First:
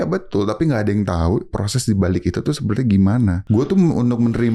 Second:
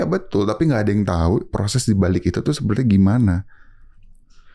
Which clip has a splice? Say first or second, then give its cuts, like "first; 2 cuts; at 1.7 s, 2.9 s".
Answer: first; 1 cut; at 3.4 s